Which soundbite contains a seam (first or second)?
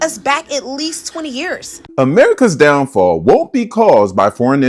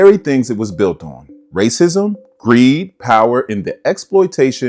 first